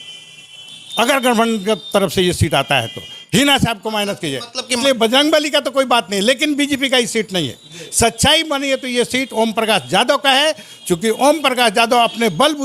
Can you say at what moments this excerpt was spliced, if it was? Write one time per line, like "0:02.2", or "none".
0:04.8